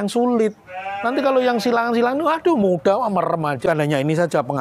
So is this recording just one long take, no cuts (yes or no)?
no